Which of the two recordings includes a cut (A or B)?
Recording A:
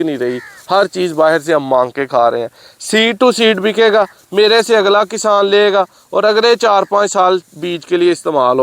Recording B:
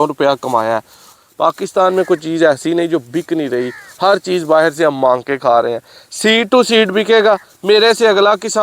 B